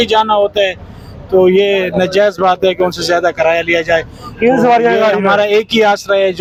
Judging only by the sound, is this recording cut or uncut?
uncut